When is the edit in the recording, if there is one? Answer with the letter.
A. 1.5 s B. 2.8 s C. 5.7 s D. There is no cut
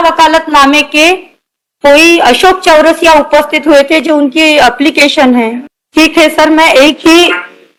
D